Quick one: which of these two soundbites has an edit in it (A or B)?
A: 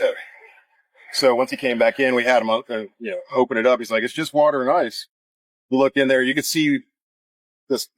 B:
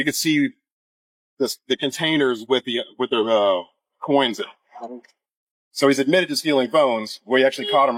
A